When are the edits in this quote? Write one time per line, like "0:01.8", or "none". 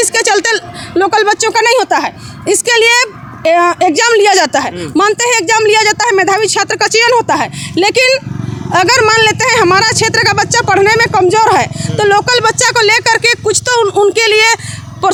none